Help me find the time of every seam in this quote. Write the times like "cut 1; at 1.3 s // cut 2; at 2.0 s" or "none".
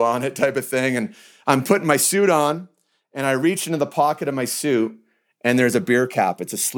none

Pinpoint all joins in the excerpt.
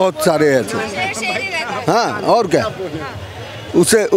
none

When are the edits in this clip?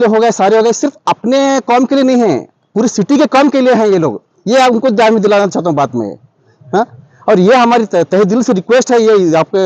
none

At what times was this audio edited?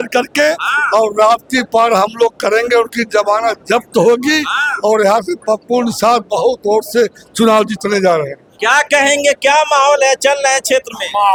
none

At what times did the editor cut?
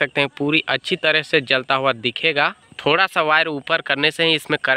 cut 1; at 2.7 s

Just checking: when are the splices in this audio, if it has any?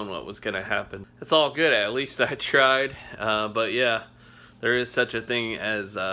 cut 1; at 1.0 s

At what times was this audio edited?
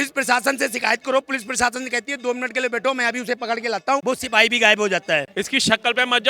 cut 1; at 4.0 s // cut 2; at 5.3 s

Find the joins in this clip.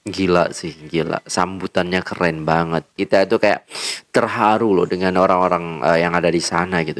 cut 1; at 3.0 s

